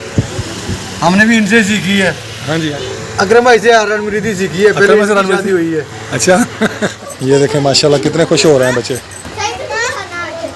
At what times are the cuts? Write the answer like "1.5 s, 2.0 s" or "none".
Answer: 2.8 s, 7.0 s